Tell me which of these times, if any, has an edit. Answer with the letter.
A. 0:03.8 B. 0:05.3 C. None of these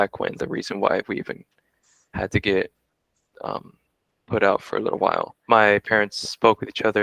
B